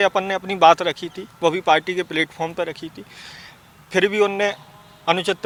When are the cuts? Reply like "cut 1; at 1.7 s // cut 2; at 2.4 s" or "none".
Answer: none